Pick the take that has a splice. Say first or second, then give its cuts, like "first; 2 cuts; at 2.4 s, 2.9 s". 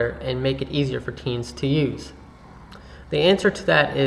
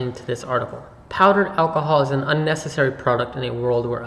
second; 1 cut; at 2.2 s